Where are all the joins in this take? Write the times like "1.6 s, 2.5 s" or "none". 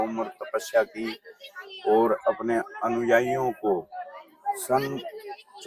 none